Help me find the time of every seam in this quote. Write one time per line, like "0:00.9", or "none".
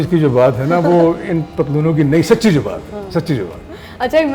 none